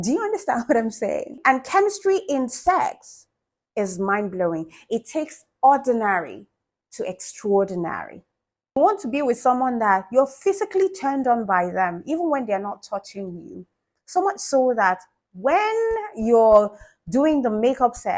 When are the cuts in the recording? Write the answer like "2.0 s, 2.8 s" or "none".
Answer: 1.3 s, 8.8 s